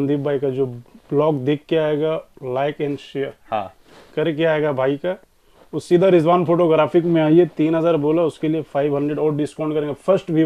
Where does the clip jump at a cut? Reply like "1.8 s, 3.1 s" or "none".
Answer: none